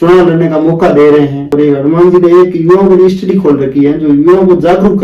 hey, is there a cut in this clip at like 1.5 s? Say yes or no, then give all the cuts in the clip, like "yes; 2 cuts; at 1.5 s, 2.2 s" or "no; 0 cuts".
yes; 1 cut; at 1.5 s